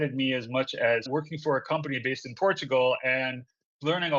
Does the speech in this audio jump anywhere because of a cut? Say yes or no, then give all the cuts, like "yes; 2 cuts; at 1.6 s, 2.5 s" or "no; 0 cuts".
yes; 1 cut; at 1.1 s